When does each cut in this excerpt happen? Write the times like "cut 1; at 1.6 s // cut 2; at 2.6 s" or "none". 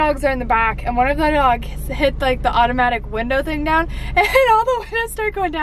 none